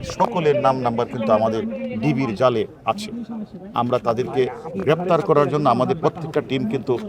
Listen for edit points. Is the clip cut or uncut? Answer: uncut